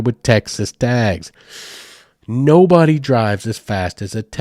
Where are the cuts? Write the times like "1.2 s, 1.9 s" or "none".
none